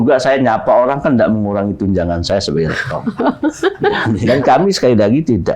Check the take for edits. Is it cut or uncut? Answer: cut